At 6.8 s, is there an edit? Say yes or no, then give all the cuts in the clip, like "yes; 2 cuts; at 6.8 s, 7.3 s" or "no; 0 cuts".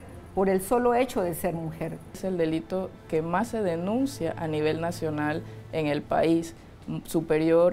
no; 1 cut; at 2.2 s